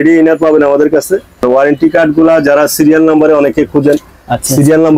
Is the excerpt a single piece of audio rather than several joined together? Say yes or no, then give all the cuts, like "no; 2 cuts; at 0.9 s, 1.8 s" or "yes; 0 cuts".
no; 1 cut; at 1.4 s